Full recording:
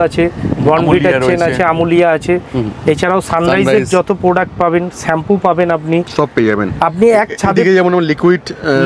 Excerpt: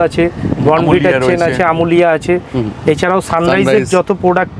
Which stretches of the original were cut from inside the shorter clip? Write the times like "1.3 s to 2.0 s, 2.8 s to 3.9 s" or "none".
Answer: none

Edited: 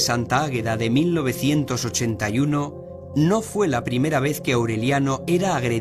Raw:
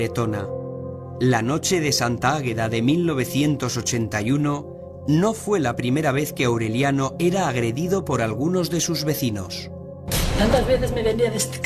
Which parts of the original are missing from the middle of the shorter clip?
none

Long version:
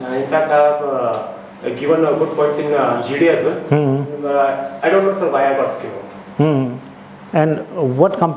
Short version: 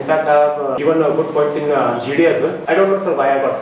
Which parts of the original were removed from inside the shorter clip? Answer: 1.0 s to 1.8 s, 3.6 s to 4.7 s

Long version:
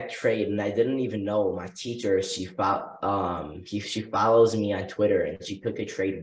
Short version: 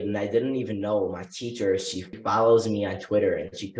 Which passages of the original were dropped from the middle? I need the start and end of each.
2.5 s to 4.0 s

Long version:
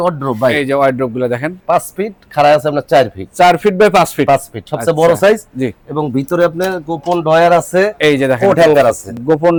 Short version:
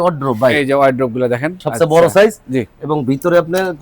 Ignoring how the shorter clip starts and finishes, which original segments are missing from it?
1.5 s to 4.6 s

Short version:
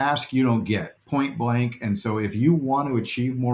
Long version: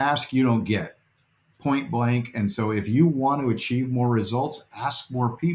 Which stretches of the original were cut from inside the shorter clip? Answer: 1.0 s to 1.5 s

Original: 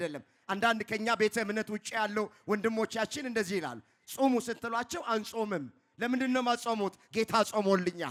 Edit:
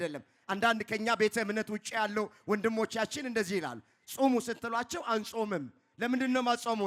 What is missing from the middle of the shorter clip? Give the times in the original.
none

